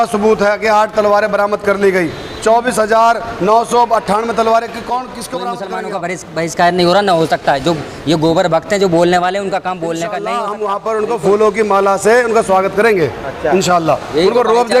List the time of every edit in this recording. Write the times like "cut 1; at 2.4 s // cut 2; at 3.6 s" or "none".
cut 1; at 5.6 s // cut 2; at 10.2 s